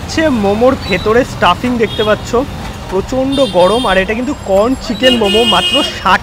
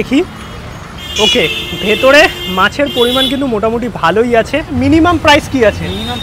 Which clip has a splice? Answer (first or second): second